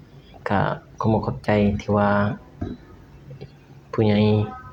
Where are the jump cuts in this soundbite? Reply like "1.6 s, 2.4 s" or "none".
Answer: none

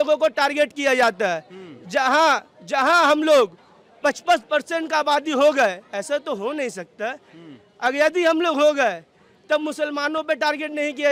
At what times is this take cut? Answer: none

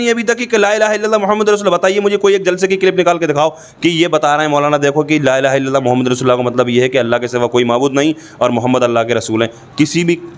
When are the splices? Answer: none

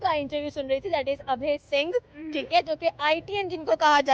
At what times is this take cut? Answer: none

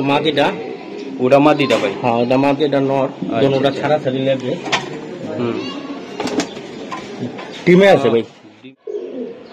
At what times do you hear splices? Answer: 8.5 s

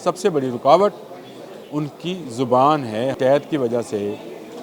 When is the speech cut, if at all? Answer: 3.1 s

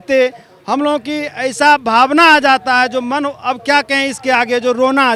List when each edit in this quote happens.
none

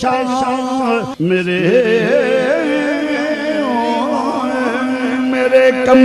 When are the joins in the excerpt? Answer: 1.1 s

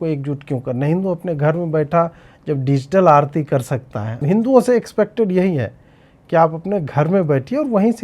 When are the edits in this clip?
4.2 s

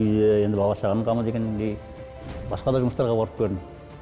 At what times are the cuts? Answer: 2.1 s

